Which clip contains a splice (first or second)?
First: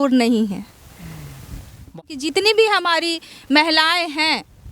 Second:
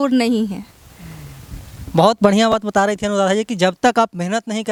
first